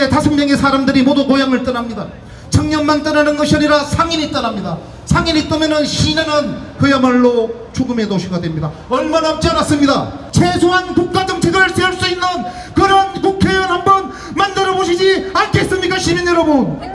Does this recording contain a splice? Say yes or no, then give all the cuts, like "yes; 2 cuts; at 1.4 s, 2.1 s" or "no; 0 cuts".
yes; 1 cut; at 10.2 s